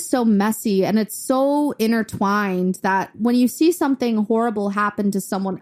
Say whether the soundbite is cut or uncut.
uncut